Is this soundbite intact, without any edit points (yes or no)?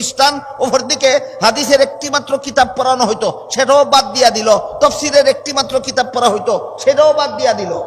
yes